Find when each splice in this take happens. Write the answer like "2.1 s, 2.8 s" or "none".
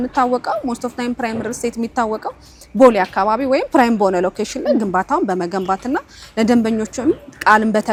none